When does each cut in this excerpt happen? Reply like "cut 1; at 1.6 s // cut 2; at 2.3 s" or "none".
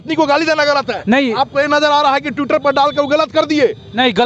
none